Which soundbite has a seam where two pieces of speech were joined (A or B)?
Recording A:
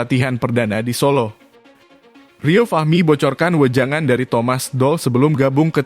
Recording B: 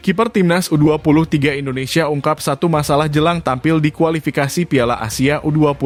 A